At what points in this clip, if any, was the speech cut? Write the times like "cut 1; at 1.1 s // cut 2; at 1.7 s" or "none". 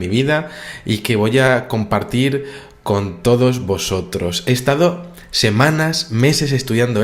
cut 1; at 4.6 s